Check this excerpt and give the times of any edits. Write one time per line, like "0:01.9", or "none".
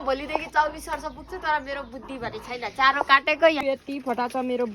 0:03.6